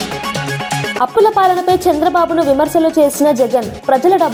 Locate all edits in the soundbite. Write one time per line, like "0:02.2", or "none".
none